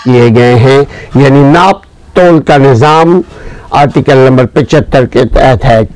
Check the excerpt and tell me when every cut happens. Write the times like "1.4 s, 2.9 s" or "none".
none